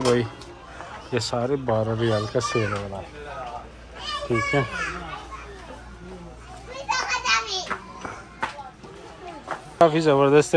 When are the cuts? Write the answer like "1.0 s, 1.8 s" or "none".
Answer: none